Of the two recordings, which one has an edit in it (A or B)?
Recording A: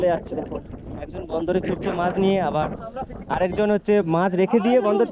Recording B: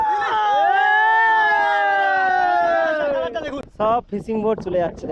B